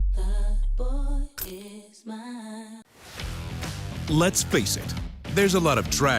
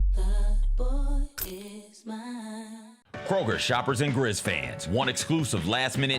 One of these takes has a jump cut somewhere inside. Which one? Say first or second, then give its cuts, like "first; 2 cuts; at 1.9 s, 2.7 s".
first; 1 cut; at 3.0 s